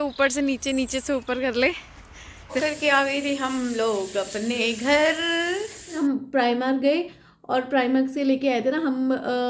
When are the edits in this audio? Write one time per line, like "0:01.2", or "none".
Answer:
0:02.6
0:05.9